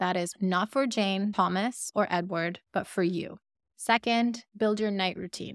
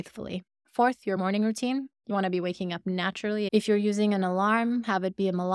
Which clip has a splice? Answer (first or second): second